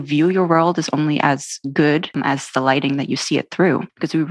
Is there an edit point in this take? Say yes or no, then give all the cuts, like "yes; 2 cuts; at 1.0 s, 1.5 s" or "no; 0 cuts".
no; 0 cuts